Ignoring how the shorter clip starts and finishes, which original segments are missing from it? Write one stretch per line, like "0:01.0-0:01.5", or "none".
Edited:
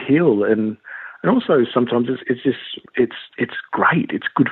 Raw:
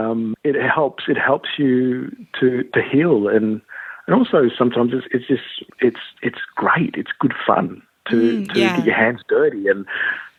none